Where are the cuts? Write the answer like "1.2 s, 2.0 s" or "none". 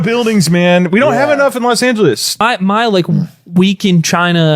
2.4 s